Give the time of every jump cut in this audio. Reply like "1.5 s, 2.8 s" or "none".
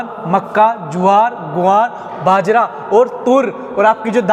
none